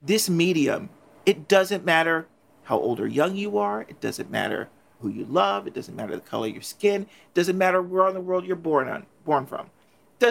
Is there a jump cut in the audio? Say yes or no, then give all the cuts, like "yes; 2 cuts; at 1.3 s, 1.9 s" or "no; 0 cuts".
yes; 1 cut; at 1.0 s